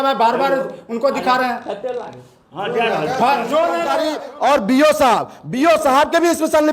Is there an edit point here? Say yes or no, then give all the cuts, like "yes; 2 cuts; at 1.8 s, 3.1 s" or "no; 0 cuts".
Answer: yes; 1 cut; at 4.1 s